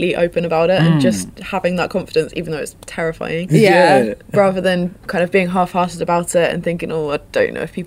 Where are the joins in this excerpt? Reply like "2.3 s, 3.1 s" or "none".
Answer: none